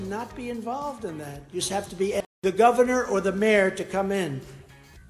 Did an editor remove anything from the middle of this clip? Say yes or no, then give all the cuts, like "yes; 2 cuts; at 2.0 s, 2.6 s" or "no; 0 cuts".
yes; 1 cut; at 2.2 s